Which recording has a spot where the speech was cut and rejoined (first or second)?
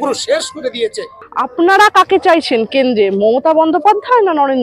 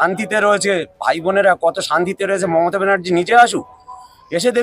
first